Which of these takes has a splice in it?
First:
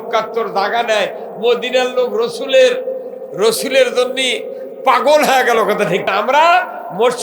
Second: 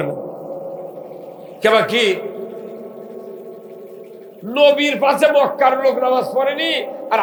first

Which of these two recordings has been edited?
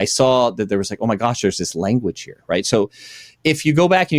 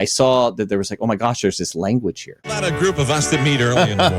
second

